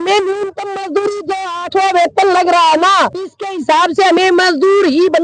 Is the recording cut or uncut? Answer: uncut